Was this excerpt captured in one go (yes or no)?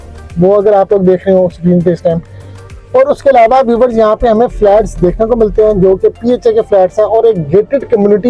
yes